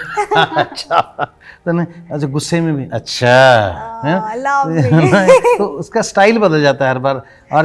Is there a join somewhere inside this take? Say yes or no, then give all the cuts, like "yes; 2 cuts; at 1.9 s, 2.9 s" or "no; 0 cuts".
no; 0 cuts